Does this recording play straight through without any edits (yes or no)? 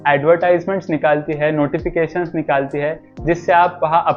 yes